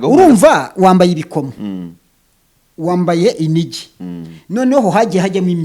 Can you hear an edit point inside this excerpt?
no; 0 cuts

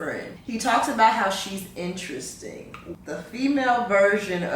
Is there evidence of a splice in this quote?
yes; 1 cut; at 3.0 s

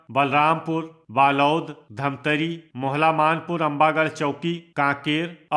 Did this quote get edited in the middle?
no; 0 cuts

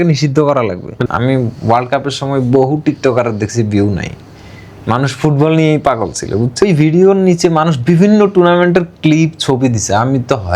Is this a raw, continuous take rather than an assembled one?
no; 2 cuts; at 0.9 s, 6.6 s

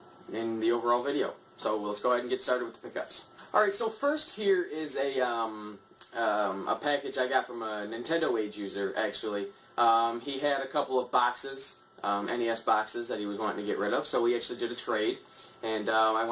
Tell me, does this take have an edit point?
no; 0 cuts

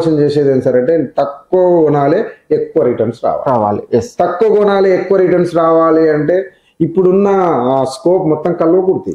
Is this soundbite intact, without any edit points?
yes; 0 cuts

